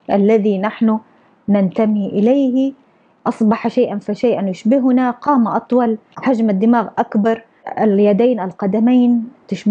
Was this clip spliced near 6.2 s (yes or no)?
yes